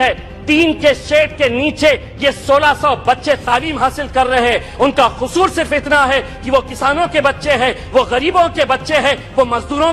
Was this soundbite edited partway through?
no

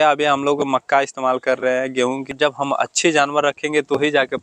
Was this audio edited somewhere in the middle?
yes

